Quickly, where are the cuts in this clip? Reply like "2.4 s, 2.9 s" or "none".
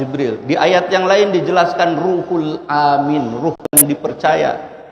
3.8 s